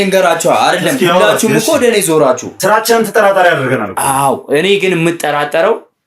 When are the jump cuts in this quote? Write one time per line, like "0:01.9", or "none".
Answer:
0:02.5